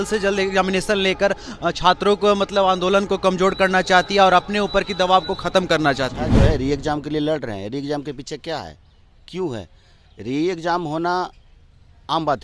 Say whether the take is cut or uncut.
cut